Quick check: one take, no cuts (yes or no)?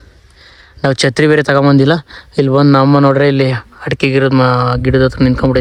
yes